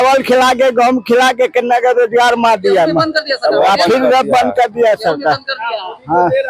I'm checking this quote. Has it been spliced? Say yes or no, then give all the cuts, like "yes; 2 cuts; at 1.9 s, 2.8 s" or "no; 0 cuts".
no; 0 cuts